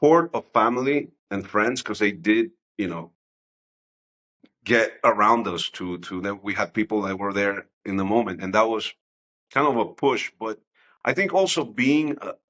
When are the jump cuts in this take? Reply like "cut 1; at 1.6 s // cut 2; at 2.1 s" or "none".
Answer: none